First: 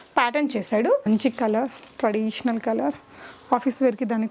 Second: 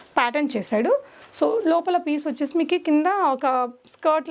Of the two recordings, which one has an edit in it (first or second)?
first